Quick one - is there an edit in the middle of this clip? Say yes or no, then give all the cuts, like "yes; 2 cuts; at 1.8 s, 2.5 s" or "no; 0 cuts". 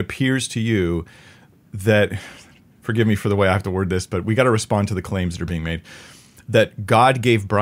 no; 0 cuts